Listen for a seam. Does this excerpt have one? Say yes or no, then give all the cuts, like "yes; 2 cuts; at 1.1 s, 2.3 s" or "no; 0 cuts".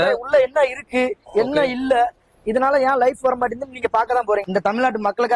yes; 1 cut; at 4.4 s